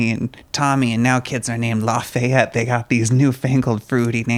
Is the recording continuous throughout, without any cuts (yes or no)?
yes